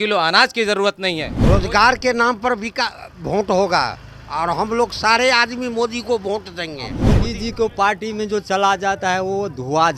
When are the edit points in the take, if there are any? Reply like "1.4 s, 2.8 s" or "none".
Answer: 1.3 s, 7.0 s